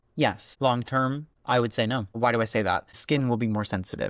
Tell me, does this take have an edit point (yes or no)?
yes